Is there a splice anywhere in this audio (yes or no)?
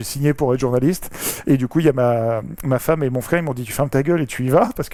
no